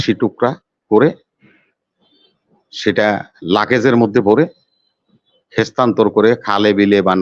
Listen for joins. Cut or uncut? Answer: uncut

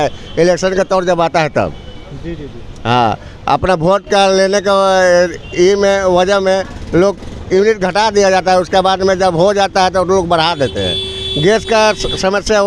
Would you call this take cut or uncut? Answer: uncut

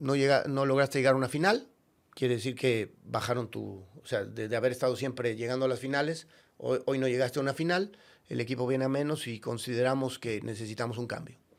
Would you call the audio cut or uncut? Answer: uncut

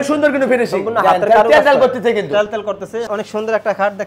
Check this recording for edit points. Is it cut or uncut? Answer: cut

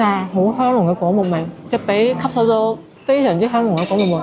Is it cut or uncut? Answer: uncut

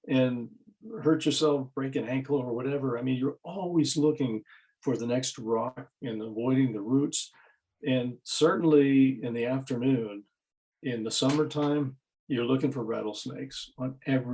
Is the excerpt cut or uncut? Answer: uncut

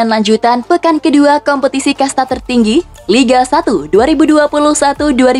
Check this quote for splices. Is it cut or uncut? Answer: uncut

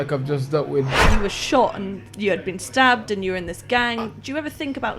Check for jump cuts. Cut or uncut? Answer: cut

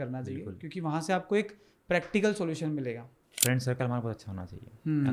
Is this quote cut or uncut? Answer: cut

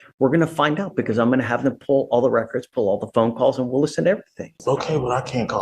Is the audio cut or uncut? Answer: cut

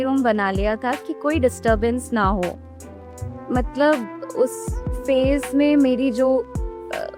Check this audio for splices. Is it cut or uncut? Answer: uncut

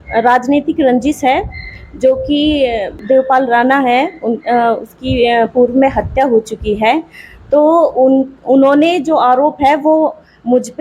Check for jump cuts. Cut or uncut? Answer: cut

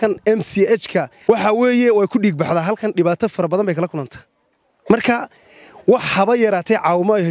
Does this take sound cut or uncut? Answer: cut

